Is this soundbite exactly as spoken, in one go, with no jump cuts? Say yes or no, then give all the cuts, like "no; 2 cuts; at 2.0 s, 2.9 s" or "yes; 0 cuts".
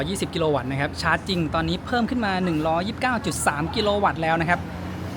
yes; 0 cuts